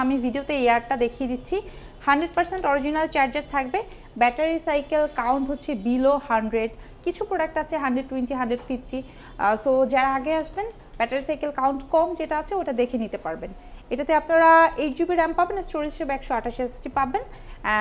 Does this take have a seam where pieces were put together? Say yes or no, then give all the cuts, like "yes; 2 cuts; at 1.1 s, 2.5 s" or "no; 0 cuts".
no; 0 cuts